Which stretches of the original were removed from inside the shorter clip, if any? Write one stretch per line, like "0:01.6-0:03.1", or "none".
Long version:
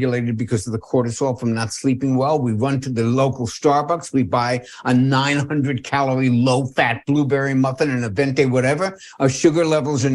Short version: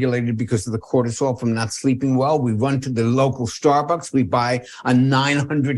none